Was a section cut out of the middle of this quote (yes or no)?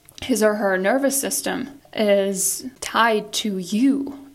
yes